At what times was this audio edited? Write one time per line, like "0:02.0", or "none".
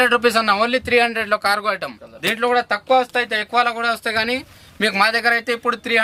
none